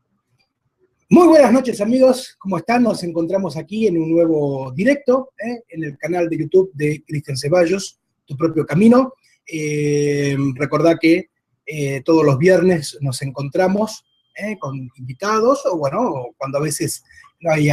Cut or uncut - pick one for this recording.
uncut